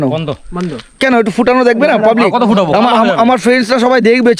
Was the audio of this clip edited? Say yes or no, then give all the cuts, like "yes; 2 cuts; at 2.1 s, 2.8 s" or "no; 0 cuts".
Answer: no; 0 cuts